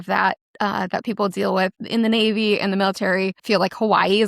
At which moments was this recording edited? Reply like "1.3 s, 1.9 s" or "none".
1.8 s, 3.4 s